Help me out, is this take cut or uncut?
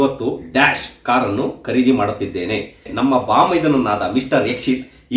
cut